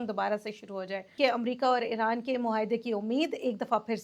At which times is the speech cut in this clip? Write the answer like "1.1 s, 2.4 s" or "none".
1.1 s